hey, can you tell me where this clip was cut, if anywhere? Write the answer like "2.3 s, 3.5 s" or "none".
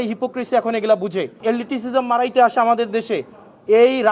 1.4 s